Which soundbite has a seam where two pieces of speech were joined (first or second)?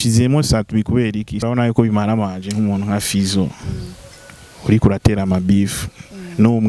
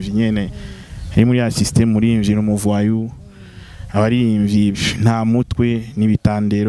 first